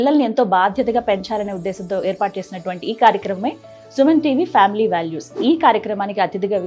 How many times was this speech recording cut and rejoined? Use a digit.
1